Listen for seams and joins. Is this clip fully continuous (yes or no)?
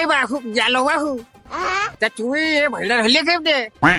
yes